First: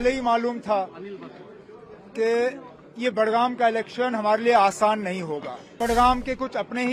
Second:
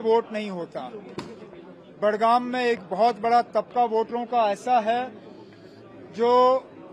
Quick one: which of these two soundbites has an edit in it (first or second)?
first